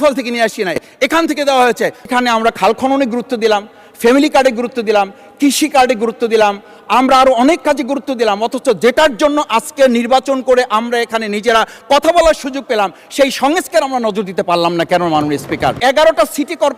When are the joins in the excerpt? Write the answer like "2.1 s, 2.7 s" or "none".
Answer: 2.1 s, 15.8 s